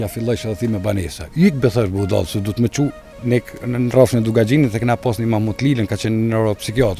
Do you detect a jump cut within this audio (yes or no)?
no